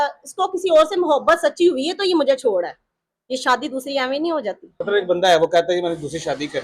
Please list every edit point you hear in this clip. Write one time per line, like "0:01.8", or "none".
0:04.7